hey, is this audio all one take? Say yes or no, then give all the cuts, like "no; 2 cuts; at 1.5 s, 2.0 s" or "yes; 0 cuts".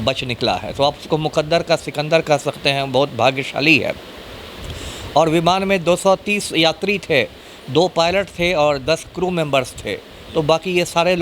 yes; 0 cuts